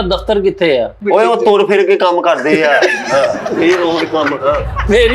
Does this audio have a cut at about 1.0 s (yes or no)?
yes